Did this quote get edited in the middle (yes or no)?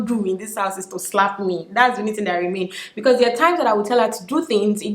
no